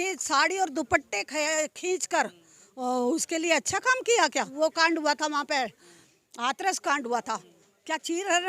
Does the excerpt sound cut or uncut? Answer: cut